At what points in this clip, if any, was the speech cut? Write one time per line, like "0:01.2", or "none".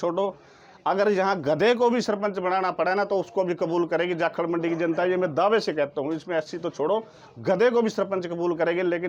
none